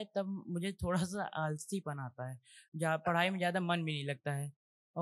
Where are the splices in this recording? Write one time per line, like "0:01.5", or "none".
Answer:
none